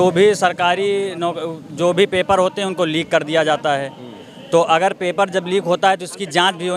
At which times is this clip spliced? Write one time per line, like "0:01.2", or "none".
none